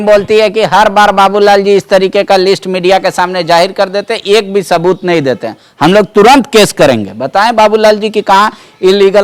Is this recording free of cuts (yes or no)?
yes